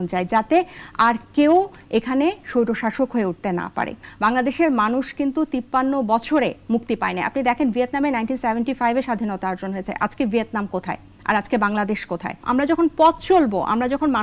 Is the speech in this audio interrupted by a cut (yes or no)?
yes